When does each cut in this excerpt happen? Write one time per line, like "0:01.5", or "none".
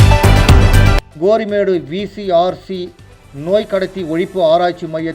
0:01.1